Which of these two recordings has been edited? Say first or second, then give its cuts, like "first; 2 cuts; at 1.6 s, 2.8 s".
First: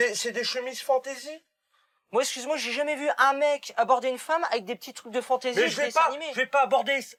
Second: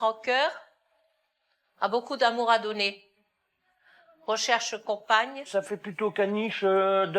second; 1 cut; at 5.5 s